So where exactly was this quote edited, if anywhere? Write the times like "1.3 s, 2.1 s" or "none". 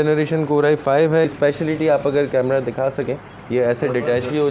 1.3 s